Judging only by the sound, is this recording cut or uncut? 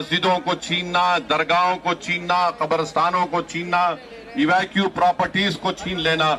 uncut